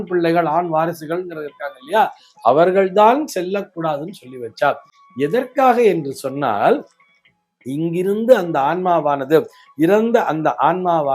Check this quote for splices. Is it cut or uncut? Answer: uncut